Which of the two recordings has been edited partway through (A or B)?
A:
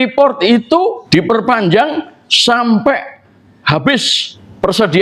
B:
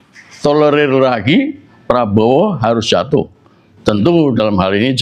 A